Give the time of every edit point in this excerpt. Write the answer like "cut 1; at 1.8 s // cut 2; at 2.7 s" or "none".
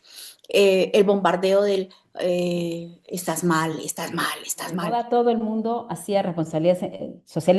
cut 1; at 4.9 s